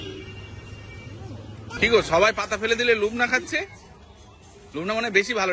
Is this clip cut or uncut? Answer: cut